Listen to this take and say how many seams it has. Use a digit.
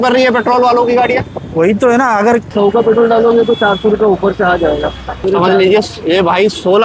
2